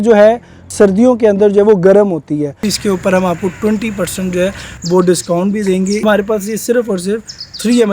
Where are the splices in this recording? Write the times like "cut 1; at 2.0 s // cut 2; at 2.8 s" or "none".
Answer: cut 1; at 2.7 s // cut 2; at 6.0 s